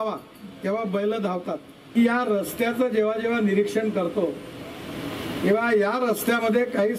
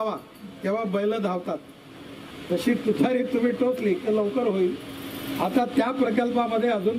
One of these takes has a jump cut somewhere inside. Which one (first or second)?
first